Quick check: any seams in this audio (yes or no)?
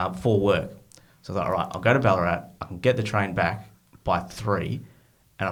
no